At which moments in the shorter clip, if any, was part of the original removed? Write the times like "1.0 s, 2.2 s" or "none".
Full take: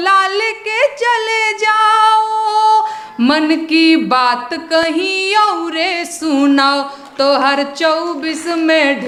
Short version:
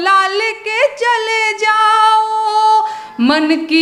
none